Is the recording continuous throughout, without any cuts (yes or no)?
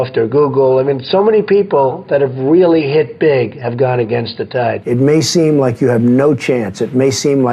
no